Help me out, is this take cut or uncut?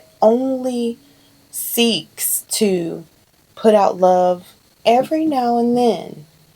cut